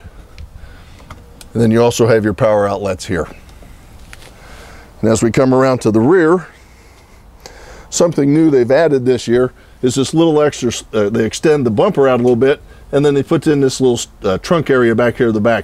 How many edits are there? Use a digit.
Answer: 0